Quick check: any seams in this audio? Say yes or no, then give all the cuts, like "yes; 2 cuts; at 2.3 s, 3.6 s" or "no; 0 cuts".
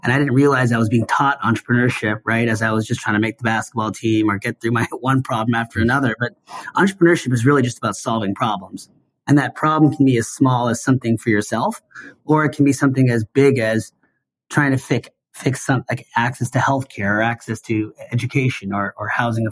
no; 0 cuts